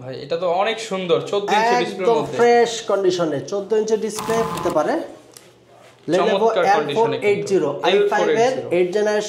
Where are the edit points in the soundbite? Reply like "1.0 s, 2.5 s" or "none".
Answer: 4.6 s